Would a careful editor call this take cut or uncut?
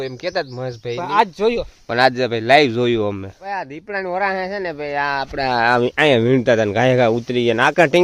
cut